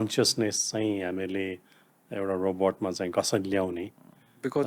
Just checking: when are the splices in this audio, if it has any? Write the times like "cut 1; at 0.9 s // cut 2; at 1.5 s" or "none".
none